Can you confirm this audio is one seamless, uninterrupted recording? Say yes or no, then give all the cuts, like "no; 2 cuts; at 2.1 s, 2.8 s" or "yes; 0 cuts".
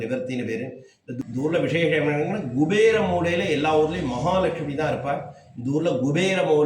no; 1 cut; at 1.1 s